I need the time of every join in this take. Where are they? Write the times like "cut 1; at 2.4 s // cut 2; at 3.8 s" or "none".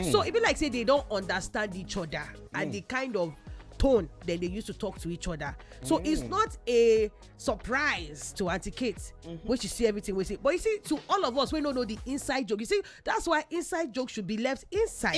none

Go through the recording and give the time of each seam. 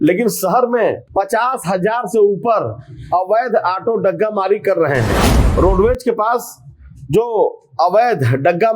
cut 1; at 1.0 s // cut 2; at 5.4 s

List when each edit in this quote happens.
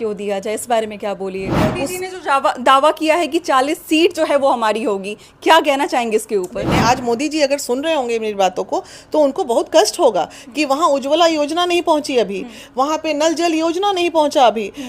cut 1; at 1.5 s // cut 2; at 6.6 s

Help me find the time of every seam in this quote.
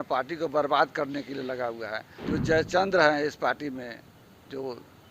cut 1; at 2.1 s

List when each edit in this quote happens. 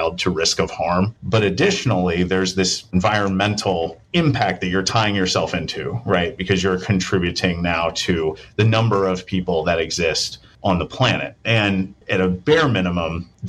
cut 1; at 1.1 s // cut 2; at 12.0 s

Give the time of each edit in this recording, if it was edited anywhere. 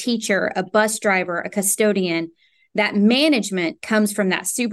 none

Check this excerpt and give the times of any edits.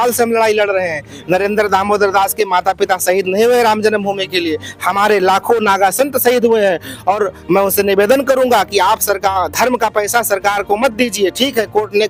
none

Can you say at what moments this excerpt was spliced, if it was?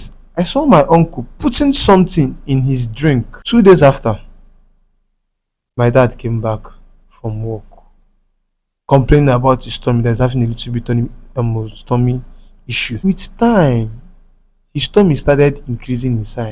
cut 1; at 3.3 s // cut 2; at 13.0 s

